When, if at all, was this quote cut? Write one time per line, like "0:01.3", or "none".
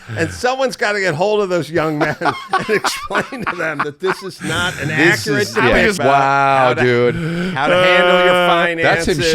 0:06.0